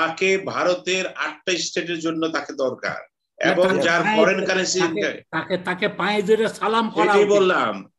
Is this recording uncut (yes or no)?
yes